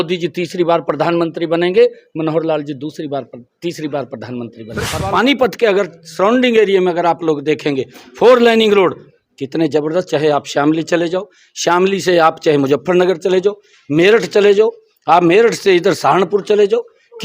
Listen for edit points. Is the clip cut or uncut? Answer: cut